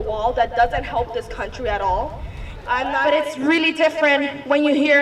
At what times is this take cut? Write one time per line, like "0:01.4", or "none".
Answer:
0:03.0